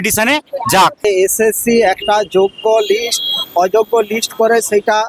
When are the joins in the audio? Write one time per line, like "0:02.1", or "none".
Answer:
0:01.0